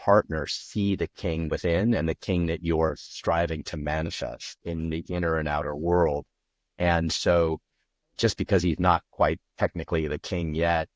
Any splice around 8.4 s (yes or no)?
no